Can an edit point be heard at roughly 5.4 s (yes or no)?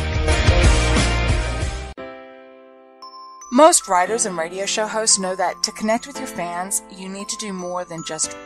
no